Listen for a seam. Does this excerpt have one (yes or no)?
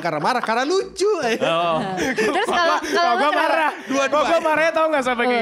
no